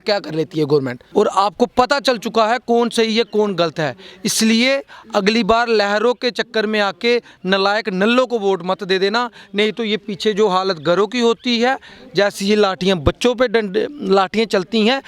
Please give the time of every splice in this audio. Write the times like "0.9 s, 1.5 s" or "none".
1.0 s

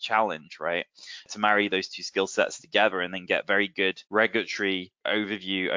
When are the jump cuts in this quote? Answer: 1.3 s, 4.0 s, 5.0 s

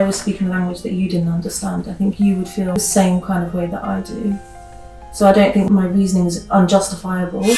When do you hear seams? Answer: 2.7 s, 5.7 s

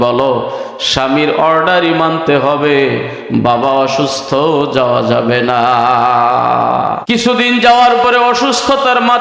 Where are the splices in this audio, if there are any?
7.0 s

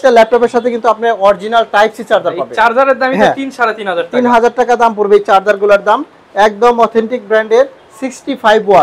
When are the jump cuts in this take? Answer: none

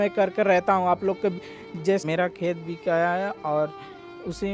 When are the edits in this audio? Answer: 2.0 s

